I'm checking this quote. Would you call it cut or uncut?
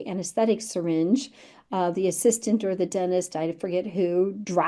uncut